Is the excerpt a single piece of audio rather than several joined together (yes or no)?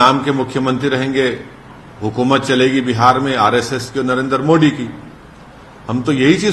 yes